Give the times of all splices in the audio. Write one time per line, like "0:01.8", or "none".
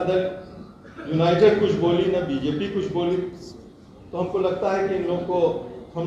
none